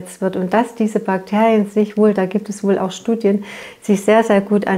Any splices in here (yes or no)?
no